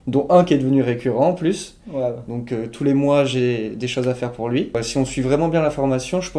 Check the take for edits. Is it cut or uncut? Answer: cut